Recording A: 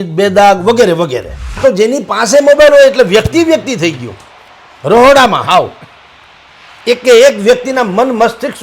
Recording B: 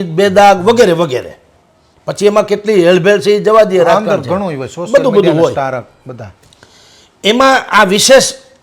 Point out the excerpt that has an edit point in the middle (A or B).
A